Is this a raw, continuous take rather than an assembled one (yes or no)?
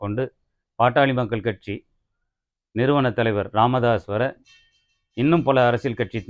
yes